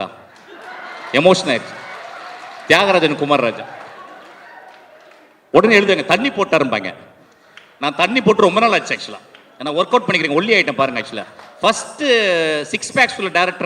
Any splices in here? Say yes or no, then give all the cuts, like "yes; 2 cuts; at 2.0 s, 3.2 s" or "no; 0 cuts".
no; 0 cuts